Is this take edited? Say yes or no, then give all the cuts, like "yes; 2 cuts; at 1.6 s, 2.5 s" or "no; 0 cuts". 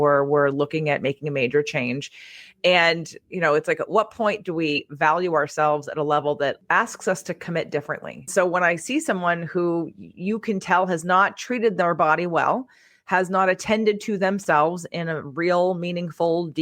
yes; 2 cuts; at 6.6 s, 8.3 s